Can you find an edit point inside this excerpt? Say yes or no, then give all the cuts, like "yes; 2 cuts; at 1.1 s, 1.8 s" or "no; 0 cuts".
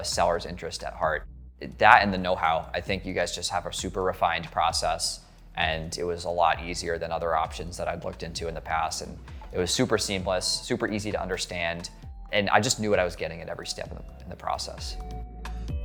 no; 0 cuts